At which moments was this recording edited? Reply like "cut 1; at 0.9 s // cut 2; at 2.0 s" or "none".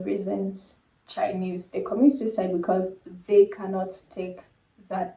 none